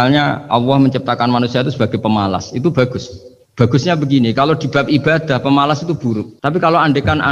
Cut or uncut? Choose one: uncut